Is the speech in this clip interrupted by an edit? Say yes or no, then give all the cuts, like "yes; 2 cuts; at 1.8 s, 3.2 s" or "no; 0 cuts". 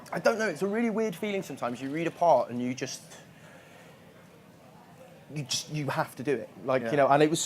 yes; 1 cut; at 6.5 s